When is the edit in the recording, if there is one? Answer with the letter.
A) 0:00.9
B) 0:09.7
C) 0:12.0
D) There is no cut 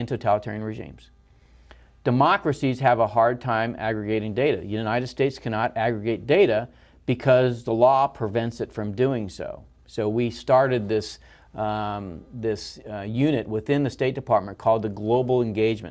A